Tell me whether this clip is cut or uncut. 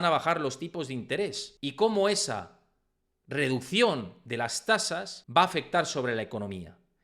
cut